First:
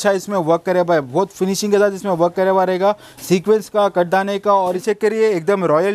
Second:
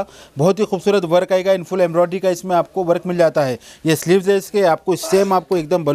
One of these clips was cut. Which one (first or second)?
first